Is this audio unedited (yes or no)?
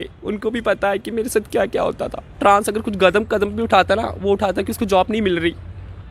no